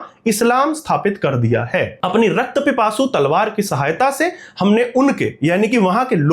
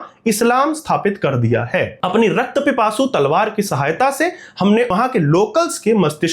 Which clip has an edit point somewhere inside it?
second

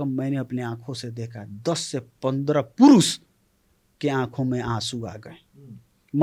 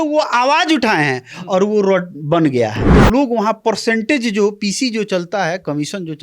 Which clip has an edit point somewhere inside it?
second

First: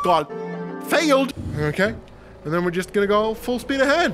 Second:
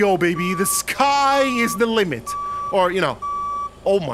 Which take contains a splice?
first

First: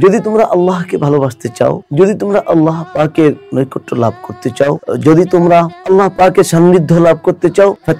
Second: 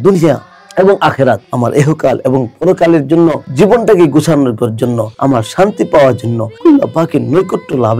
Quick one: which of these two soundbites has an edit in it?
second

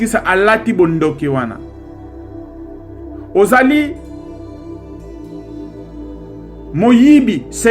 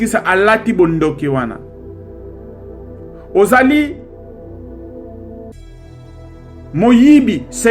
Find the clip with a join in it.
first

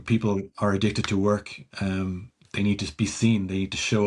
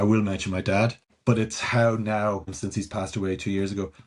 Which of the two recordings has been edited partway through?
second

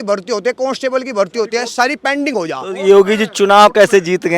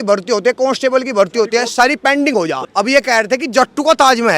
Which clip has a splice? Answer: second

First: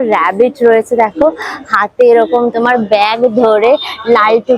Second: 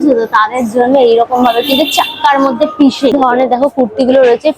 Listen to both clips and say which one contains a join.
second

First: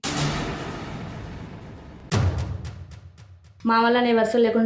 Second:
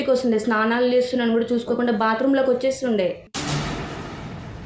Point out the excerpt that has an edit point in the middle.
first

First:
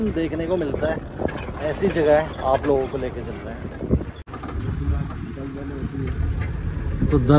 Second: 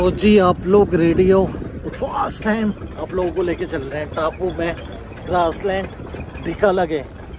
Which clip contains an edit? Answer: first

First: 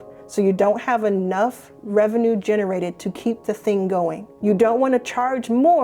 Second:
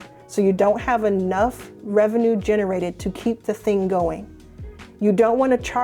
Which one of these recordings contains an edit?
first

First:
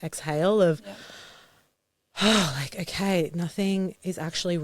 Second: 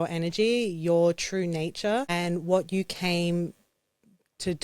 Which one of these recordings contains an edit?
second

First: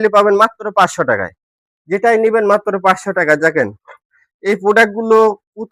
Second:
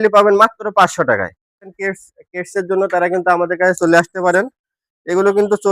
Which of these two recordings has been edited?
second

